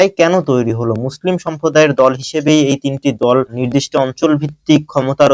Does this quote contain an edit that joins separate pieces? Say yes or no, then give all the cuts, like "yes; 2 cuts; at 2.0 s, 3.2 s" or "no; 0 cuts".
yes; 1 cut; at 3.6 s